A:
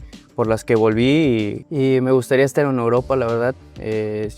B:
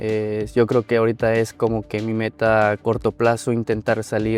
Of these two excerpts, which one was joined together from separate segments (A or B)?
A